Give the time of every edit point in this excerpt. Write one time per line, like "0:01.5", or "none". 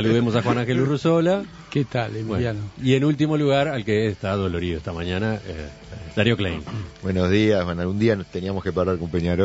0:04.2

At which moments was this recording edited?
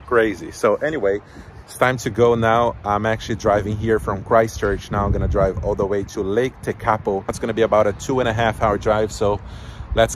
0:07.4

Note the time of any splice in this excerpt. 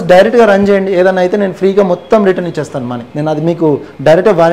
none

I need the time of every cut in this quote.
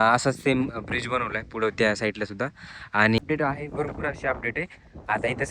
0:03.2

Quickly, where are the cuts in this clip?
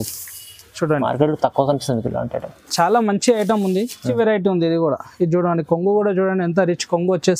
0:04.1

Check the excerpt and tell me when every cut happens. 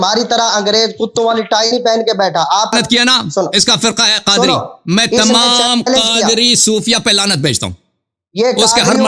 0:02.7

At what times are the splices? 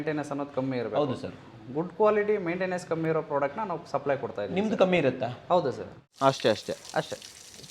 0:06.1

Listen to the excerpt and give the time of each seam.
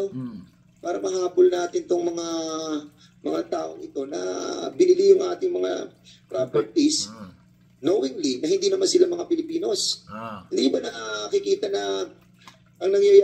none

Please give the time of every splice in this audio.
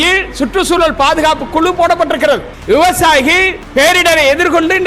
0:02.5
0:03.6

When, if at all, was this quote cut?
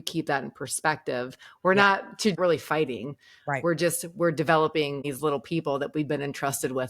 0:02.4
0:05.0

